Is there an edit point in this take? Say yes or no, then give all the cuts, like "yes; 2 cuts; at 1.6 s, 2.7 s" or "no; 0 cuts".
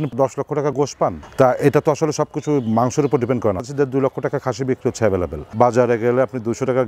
yes; 3 cuts; at 1.2 s, 3.6 s, 5.5 s